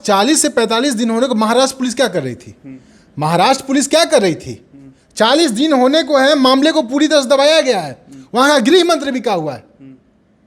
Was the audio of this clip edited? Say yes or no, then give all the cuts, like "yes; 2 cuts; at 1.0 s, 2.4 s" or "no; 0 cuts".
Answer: no; 0 cuts